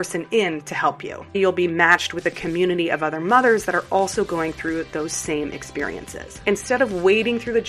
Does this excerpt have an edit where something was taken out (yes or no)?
yes